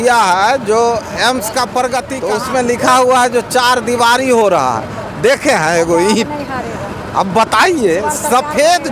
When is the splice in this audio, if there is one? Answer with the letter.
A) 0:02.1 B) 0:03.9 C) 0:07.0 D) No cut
A